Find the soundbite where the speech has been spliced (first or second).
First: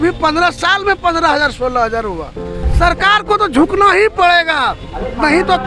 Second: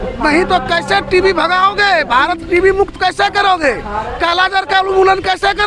first